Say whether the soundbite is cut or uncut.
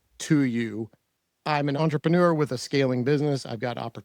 cut